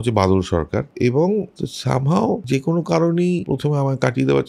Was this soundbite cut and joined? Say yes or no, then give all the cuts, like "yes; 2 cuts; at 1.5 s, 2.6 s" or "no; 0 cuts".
yes; 4 cuts; at 0.9 s, 1.6 s, 2.4 s, 3.4 s